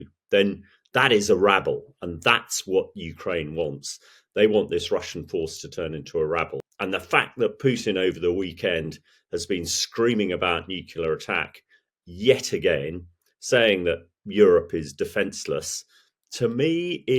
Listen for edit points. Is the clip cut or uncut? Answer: cut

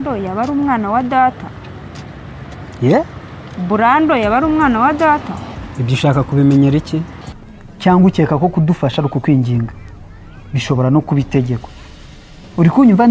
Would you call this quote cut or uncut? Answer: cut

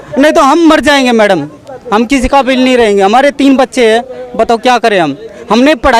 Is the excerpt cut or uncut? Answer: uncut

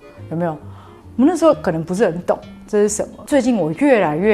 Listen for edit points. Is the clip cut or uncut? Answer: cut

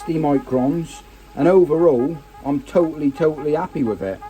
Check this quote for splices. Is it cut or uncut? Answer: uncut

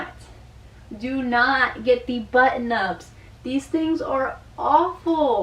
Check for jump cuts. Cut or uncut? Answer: uncut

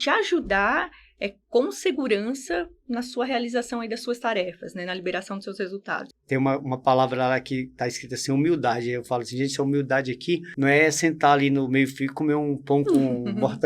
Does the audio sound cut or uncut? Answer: cut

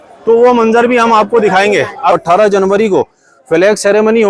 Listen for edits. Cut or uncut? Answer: cut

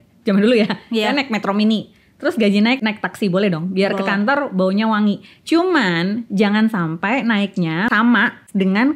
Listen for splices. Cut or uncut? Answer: cut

